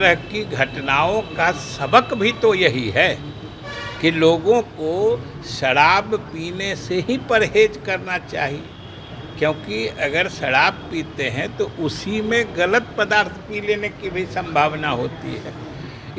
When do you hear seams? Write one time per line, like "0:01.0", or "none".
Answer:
none